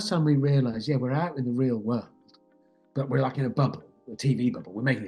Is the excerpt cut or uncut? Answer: uncut